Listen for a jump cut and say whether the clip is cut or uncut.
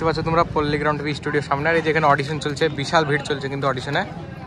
uncut